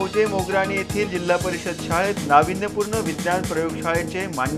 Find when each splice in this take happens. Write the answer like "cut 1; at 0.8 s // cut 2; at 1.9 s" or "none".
none